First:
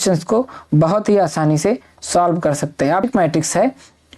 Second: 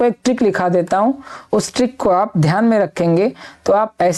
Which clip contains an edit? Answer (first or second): first